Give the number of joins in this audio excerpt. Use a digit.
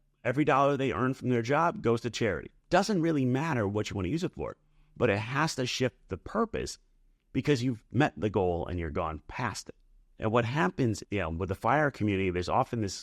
2